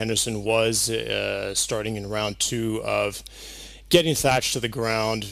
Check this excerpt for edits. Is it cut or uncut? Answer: uncut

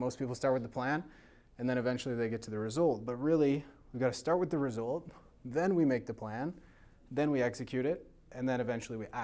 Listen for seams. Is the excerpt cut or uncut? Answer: uncut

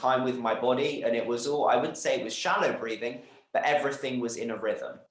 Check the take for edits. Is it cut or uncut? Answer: uncut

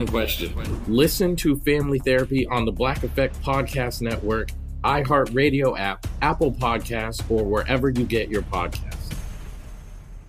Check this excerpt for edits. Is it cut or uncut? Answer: uncut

